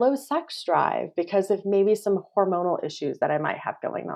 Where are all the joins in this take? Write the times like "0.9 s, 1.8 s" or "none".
none